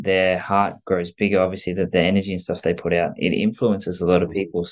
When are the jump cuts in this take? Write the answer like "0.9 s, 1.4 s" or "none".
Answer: none